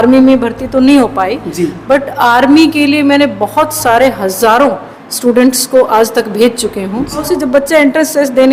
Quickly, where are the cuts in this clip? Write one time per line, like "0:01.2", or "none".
0:07.2